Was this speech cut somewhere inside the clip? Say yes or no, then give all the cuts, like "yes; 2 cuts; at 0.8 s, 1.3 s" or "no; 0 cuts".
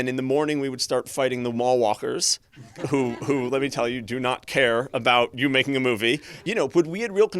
yes; 1 cut; at 6.3 s